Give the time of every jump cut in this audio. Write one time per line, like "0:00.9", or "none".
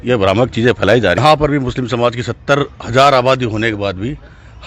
0:01.2